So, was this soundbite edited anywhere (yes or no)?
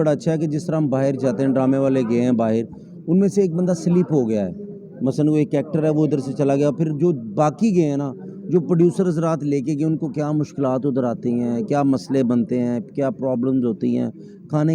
no